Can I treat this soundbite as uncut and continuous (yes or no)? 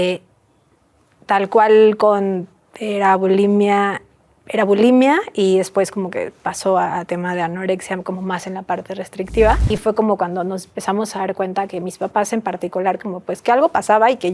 no